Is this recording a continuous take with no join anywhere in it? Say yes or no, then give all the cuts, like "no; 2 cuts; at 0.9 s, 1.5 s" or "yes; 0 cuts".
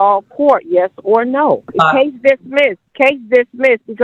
no; 2 cuts; at 1.7 s, 2.8 s